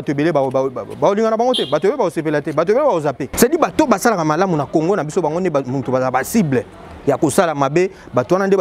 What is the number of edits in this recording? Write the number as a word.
one